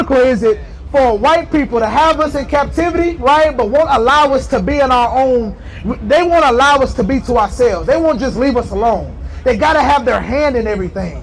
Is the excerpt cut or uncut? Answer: uncut